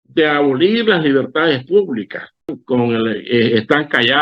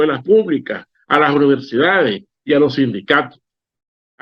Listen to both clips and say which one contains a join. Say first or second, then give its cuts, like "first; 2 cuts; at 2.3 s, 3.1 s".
first; 1 cut; at 2.5 s